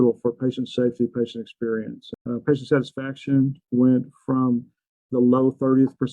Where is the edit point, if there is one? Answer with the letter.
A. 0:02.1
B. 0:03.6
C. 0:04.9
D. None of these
A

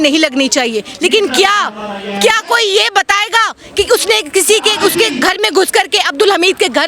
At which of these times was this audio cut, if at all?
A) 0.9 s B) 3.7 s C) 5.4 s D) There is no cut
D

